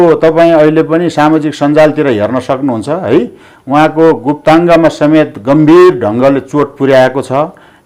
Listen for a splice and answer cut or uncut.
uncut